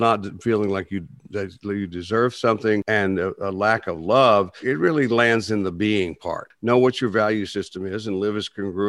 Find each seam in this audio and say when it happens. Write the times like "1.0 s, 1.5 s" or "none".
2.8 s, 4.6 s, 6.5 s